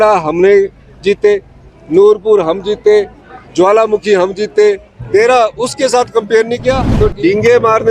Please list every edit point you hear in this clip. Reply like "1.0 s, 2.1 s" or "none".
6.9 s